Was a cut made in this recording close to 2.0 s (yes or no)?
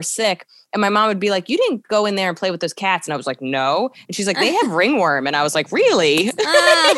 no